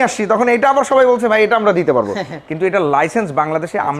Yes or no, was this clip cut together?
no